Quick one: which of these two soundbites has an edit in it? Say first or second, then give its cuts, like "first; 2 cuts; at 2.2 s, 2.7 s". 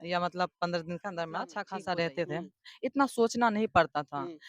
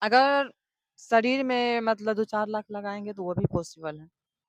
first; 1 cut; at 1.6 s